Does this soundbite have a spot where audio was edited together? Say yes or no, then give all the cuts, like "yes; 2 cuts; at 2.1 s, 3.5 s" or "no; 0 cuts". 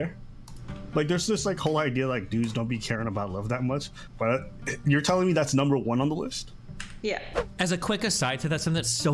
yes; 1 cut; at 7.5 s